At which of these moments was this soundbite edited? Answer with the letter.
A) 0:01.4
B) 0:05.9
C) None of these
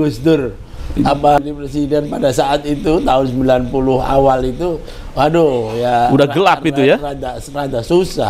A